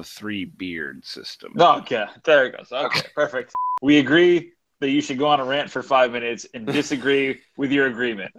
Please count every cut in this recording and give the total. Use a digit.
1